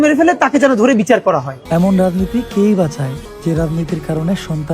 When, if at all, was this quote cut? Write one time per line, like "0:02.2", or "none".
0:01.5
0:03.3